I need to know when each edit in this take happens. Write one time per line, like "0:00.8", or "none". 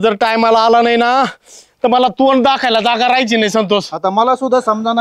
none